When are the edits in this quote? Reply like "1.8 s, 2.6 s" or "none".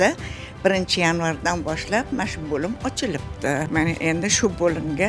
2.1 s